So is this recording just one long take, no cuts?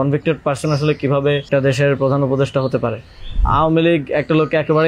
no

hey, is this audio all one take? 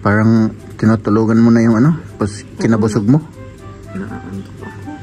yes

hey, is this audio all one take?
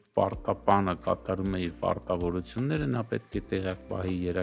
yes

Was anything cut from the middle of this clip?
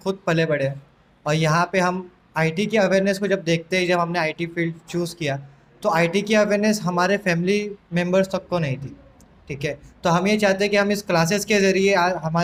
no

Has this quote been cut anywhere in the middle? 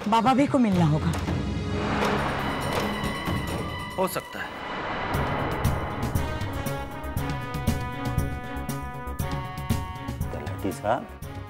yes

